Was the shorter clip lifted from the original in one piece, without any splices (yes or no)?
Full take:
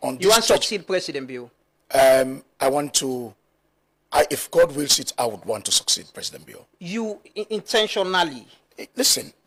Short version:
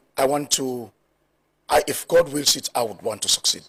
yes